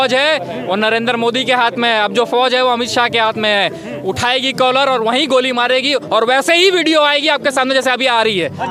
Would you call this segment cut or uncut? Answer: uncut